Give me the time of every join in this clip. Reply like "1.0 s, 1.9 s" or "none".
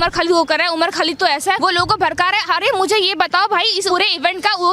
1.6 s, 3.9 s